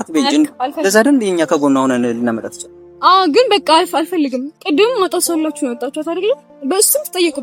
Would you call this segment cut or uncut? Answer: uncut